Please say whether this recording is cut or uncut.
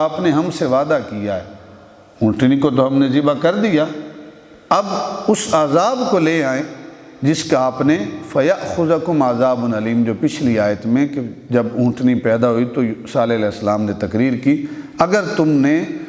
uncut